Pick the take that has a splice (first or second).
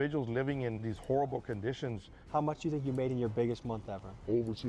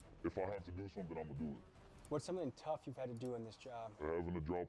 first